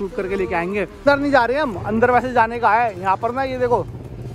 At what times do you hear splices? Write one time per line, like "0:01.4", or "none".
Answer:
0:00.9